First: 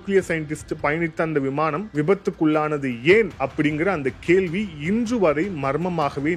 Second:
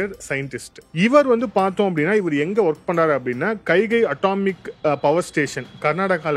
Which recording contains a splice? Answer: first; 2 cuts; at 1.8 s, 3.4 s

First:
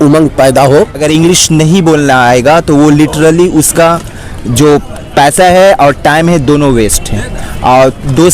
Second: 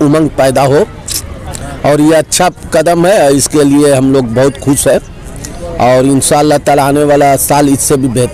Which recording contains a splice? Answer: first; 1 cut; at 1.0 s

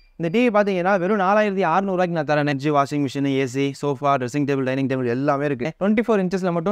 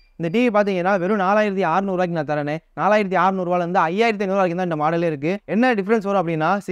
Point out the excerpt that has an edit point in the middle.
first; 2 cuts; at 2.6 s, 5.7 s

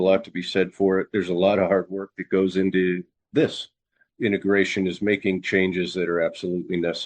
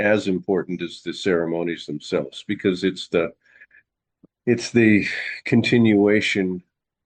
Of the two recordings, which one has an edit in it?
first; 2 cuts; at 3.2 s, 4.0 s

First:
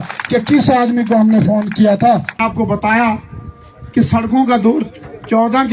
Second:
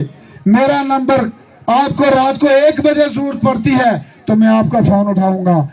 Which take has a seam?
first; 1 cut; at 2.4 s

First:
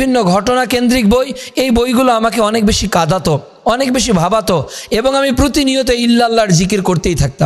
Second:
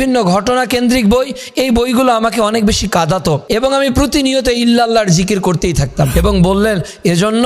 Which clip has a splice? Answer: second; 2 cuts; at 3.4 s, 6.1 s

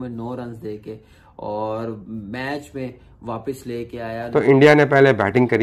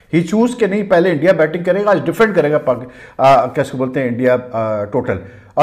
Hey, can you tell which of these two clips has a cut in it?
first; 1 cut; at 4.1 s

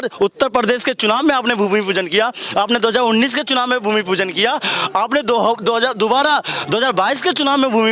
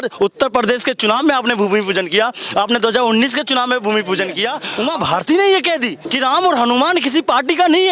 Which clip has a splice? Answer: second; 2 cuts; at 4.6 s, 6.0 s

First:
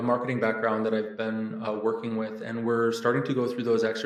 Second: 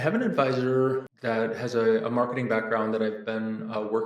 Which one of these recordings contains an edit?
second; 1 cut; at 1.1 s

